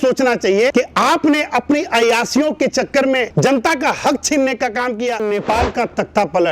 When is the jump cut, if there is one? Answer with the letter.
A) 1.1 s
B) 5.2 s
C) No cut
B